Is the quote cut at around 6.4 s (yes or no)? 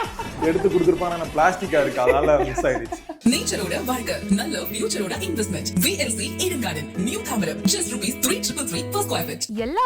no